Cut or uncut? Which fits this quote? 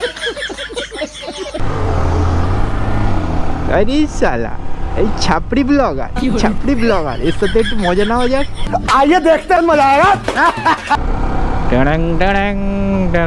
cut